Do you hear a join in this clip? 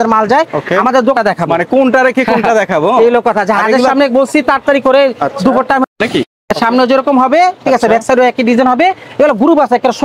yes; 2 cuts; at 1.1 s, 5.8 s

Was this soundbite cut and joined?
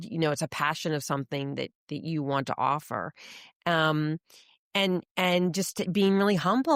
no; 0 cuts

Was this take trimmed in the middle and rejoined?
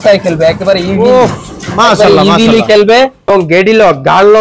yes; 1 cut; at 2.9 s

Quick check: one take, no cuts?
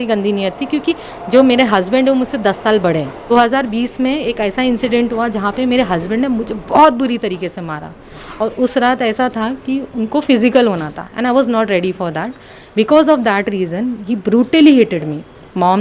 no; 1 cut; at 3.3 s

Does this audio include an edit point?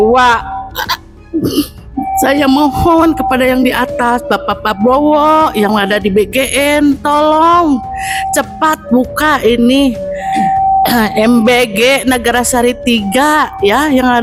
no; 0 cuts

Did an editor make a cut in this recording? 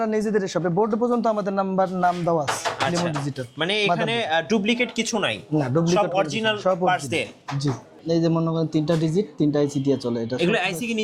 yes; 1 cut; at 7.9 s

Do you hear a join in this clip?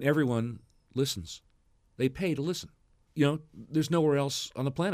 no; 0 cuts

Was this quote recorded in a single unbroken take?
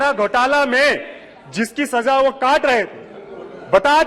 yes; 0 cuts

